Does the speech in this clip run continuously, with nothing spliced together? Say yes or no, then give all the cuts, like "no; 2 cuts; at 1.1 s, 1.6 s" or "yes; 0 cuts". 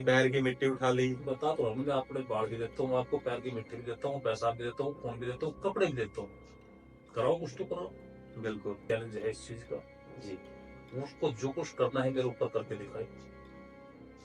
no; 1 cut; at 8.9 s